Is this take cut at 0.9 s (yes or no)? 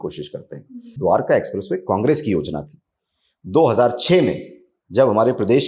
yes